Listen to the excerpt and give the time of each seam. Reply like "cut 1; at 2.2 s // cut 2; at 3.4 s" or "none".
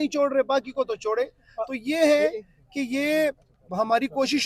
none